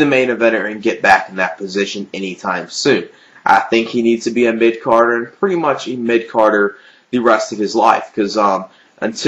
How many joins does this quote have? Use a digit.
1